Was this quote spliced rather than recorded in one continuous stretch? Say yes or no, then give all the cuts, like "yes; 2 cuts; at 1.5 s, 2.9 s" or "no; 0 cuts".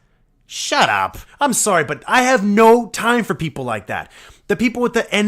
yes; 1 cut; at 1.2 s